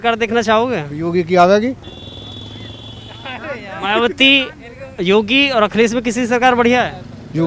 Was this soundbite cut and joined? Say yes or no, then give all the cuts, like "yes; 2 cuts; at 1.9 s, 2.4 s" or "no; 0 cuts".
no; 0 cuts